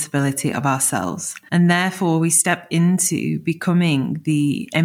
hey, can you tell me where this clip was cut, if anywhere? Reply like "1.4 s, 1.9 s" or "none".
1.3 s